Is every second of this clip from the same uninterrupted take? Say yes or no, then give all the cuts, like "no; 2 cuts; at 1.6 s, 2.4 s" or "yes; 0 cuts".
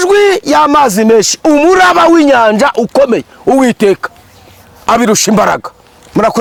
yes; 0 cuts